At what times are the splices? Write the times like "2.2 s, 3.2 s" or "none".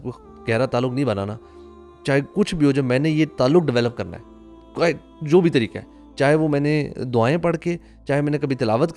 none